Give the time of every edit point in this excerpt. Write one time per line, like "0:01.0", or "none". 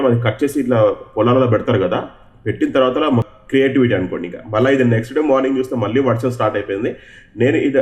0:03.3